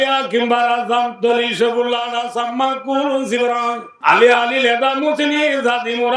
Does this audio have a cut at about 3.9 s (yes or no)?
yes